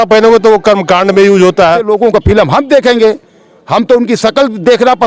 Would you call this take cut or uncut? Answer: cut